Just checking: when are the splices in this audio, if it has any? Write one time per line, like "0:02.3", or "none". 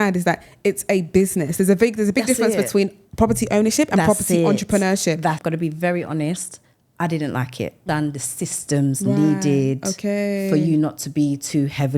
0:05.4
0:07.8